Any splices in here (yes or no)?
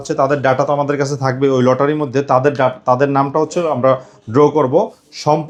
no